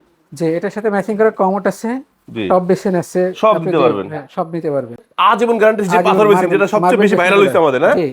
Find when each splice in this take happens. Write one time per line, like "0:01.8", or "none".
0:05.1